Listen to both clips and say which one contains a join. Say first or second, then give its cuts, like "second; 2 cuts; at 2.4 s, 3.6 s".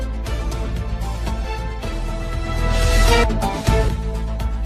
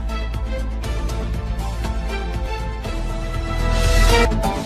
second; 1 cut; at 1.1 s